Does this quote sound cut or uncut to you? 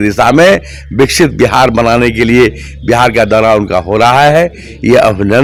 uncut